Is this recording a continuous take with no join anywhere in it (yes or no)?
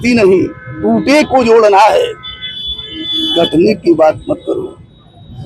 yes